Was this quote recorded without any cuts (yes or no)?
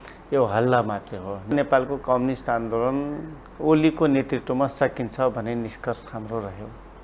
no